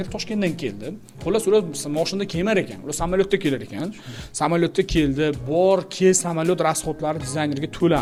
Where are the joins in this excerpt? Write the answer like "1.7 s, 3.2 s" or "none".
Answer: none